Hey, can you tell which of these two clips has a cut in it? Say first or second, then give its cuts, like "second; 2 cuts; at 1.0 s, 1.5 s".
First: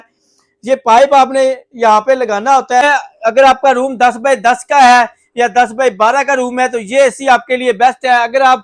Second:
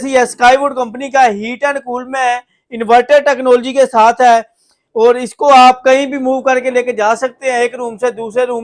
first; 1 cut; at 2.8 s